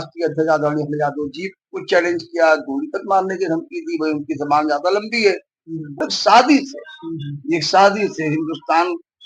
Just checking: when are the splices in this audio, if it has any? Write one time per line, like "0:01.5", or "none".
0:06.1